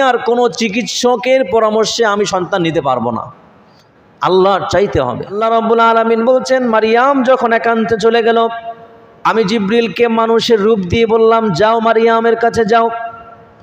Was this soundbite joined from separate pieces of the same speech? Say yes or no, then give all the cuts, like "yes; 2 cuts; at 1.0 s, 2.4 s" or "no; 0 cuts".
yes; 1 cut; at 5.4 s